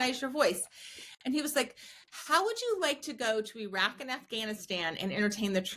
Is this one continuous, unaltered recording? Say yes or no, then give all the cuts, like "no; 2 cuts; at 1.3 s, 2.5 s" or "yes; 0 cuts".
yes; 0 cuts